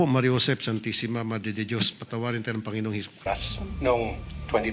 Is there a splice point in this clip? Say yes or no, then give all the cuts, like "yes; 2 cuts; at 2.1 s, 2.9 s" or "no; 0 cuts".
yes; 1 cut; at 3.2 s